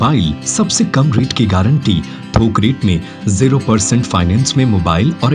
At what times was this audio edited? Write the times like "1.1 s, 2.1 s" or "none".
none